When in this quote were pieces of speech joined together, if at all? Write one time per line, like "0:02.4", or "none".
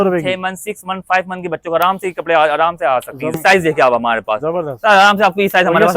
0:03.3

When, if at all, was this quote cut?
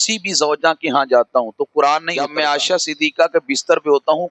0:02.2

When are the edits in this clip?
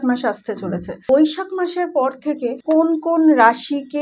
0:01.0
0:02.6

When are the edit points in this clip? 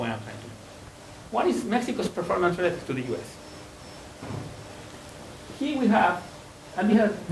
0:02.7

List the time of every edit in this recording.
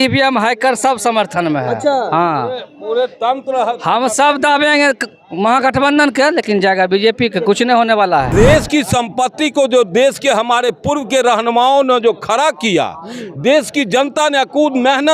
0:08.3

